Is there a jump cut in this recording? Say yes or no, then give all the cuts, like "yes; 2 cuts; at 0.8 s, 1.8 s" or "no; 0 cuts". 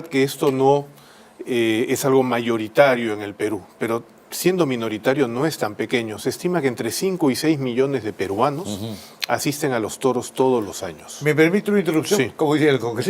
yes; 1 cut; at 11.8 s